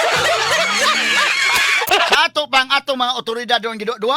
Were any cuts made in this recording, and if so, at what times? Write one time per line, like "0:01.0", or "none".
0:01.9